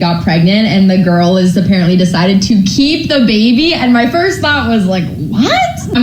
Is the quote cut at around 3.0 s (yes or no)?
yes